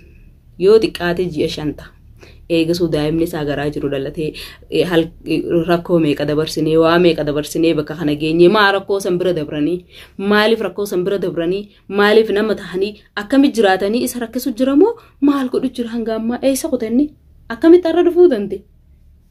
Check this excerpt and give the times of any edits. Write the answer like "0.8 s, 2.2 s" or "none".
none